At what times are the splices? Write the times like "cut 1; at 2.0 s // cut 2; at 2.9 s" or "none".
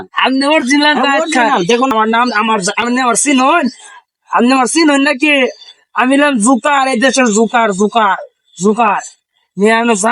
cut 1; at 1.9 s